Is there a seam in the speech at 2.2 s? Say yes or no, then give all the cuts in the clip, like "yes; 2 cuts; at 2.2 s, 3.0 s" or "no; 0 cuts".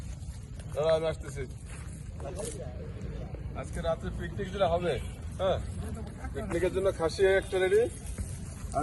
yes; 1 cut; at 2.2 s